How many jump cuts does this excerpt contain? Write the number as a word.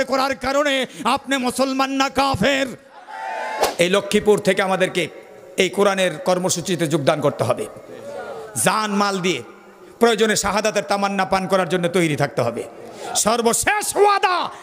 one